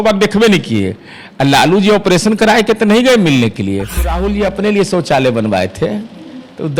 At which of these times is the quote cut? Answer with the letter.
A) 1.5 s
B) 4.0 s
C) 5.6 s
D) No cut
B